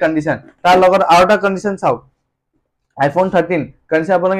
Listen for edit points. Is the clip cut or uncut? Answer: uncut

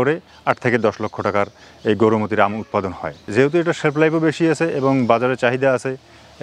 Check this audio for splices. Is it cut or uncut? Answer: cut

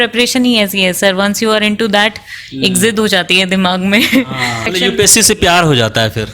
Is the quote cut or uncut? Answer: cut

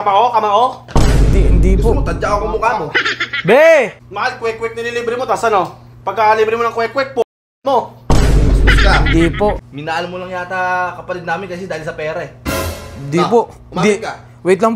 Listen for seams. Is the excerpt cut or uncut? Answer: cut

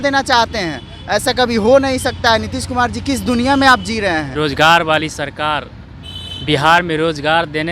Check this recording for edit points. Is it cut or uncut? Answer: cut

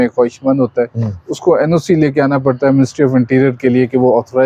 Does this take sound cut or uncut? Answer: uncut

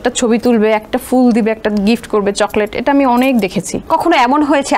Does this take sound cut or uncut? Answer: cut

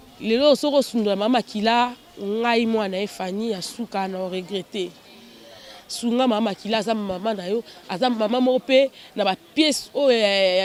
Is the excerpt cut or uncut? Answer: uncut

